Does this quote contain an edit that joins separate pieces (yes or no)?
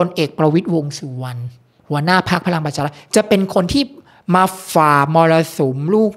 no